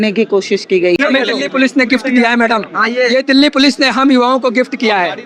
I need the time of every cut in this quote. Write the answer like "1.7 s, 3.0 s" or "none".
1.0 s